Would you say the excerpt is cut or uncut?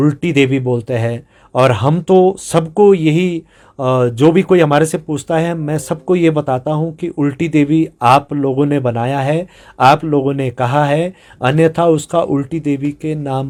uncut